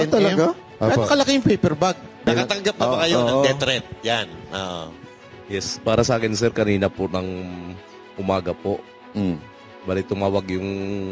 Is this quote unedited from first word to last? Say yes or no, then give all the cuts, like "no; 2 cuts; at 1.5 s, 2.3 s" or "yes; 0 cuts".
no; 1 cut; at 2.3 s